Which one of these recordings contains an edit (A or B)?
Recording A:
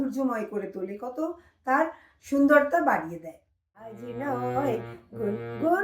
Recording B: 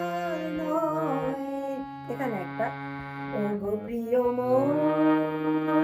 A